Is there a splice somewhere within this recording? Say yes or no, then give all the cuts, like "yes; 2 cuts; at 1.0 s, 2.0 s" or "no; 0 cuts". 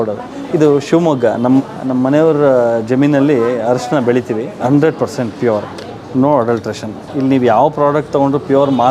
yes; 1 cut; at 4.6 s